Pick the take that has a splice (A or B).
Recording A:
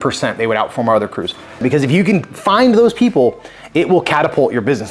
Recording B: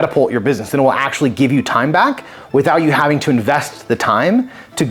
A